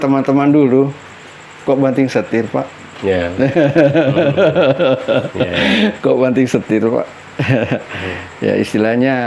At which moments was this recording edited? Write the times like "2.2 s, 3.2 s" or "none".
none

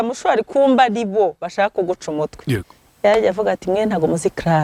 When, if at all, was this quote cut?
none

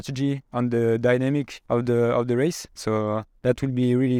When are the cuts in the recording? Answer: 1.5 s, 3.3 s

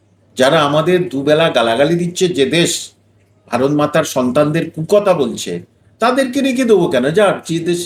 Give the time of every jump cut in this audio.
none

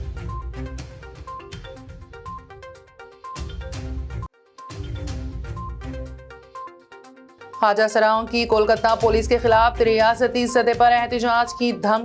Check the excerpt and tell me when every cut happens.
1.5 s

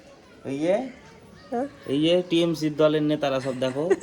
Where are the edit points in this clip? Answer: none

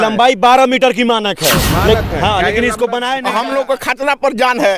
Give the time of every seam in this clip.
3.2 s

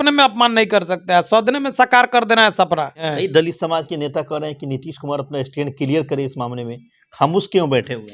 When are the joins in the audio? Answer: 3.1 s

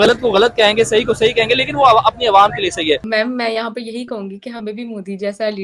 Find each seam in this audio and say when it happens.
3.1 s

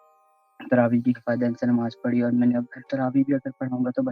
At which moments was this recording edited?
1.2 s, 2.9 s

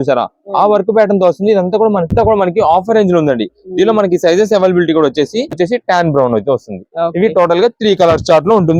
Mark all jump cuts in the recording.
2.3 s, 5.5 s

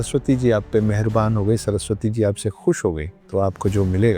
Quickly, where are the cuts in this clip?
3.1 s

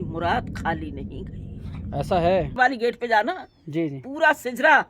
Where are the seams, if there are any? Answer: 2.5 s

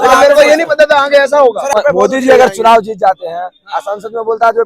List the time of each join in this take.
1.7 s

